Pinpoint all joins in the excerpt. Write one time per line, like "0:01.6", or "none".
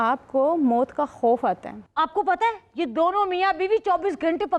0:01.8